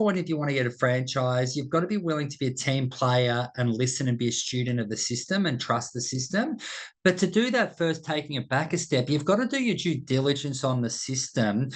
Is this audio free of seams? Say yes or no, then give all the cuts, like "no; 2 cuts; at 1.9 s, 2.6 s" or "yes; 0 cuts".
yes; 0 cuts